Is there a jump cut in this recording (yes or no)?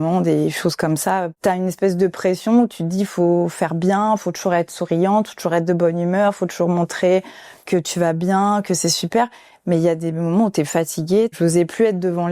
yes